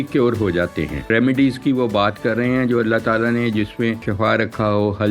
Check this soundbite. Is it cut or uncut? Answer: cut